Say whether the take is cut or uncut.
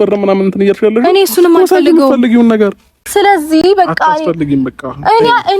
cut